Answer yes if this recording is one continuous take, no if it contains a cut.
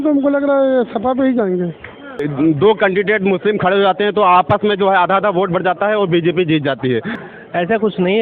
no